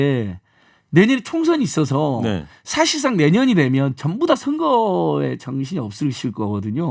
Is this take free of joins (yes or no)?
yes